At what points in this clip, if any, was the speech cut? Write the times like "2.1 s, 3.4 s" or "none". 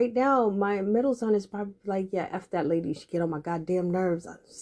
none